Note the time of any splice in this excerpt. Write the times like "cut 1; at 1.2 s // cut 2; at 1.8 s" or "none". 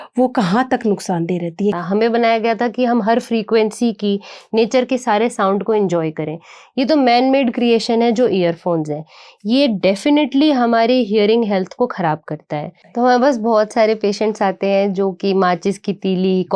cut 1; at 1.8 s // cut 2; at 12.8 s